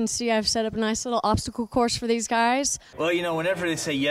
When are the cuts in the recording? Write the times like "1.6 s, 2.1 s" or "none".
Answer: 2.8 s